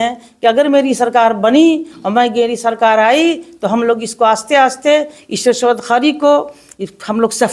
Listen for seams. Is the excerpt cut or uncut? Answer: uncut